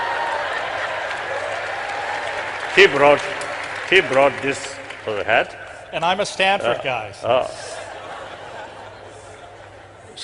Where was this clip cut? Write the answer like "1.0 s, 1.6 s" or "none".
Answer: 5.2 s